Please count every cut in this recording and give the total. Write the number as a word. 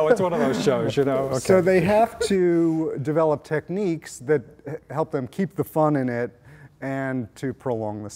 zero